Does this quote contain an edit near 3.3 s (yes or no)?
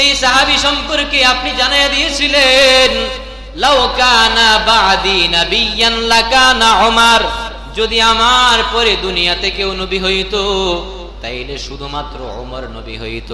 no